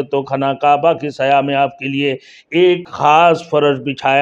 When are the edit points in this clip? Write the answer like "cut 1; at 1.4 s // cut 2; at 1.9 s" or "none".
cut 1; at 2.9 s